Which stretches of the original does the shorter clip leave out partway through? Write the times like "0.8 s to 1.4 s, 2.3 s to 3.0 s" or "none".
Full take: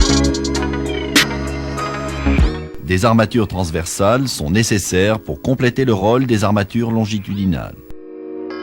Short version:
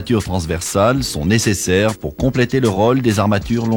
none